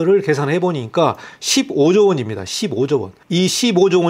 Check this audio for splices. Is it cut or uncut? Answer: uncut